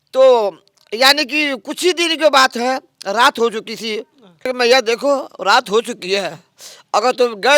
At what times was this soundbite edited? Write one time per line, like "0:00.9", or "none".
0:04.5